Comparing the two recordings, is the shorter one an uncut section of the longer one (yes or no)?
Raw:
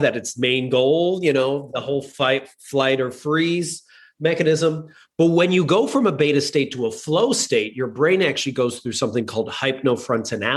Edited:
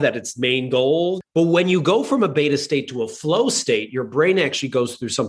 no